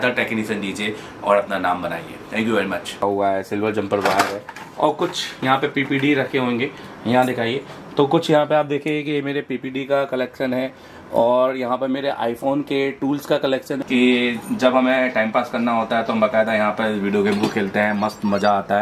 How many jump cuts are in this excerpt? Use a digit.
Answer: 2